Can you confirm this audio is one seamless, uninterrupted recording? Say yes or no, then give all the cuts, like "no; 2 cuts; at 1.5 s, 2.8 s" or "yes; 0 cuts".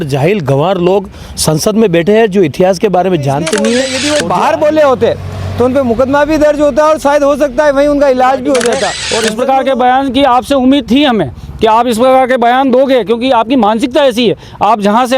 no; 2 cuts; at 4.0 s, 9.0 s